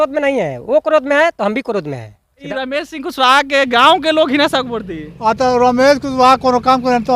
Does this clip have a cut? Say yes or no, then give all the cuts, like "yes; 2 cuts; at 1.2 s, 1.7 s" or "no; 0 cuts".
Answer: yes; 1 cut; at 2.4 s